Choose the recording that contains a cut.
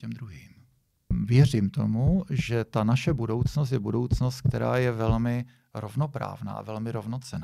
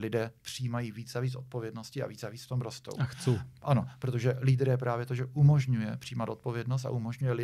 first; 1 cut; at 1.0 s

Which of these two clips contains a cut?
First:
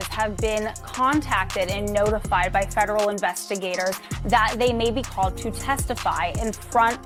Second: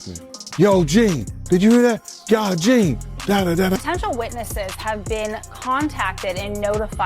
second; 1 cut; at 3.8 s

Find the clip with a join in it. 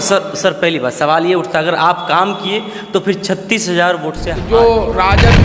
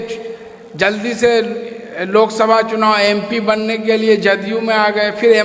first; 1 cut; at 4.3 s

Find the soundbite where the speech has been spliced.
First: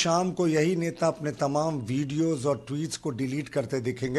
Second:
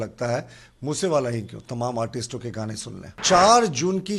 second; 1 cut; at 3.2 s

